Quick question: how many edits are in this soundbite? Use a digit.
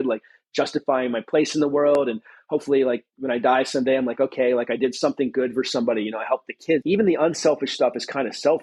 1